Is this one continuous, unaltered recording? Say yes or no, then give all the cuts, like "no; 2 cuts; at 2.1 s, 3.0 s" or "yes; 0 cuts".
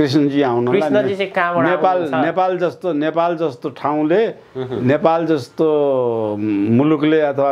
yes; 0 cuts